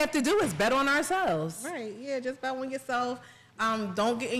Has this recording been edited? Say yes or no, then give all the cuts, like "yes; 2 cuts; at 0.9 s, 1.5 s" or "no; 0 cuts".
no; 0 cuts